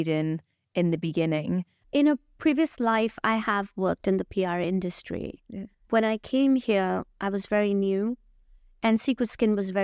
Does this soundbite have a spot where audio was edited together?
yes; 2 cuts; at 1.8 s, 5.8 s

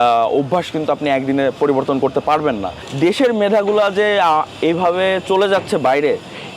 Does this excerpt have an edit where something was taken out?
yes; 1 cut; at 2.8 s

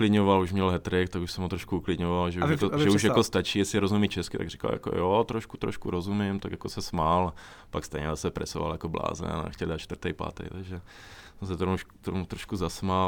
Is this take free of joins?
yes; 0 cuts

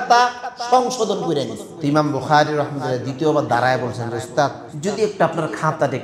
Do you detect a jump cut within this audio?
yes; 2 cuts; at 1.6 s, 4.7 s

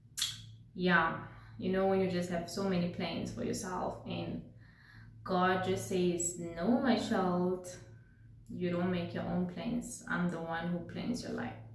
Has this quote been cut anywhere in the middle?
no; 0 cuts

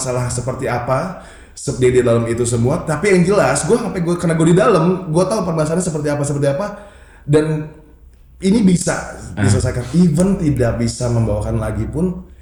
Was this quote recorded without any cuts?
yes; 0 cuts

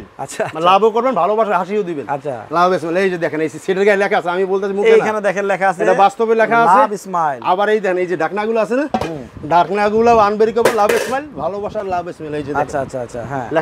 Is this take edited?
no; 0 cuts

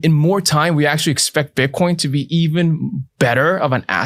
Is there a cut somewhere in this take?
no; 0 cuts

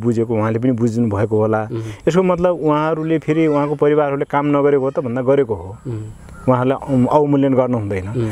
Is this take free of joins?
yes; 0 cuts

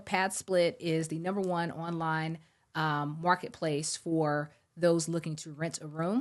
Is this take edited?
no; 0 cuts

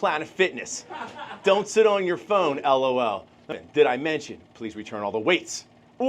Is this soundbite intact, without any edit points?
no; 1 cut; at 3.6 s

